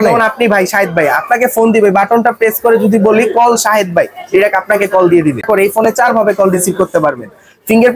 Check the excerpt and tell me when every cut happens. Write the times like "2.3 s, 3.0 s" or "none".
5.5 s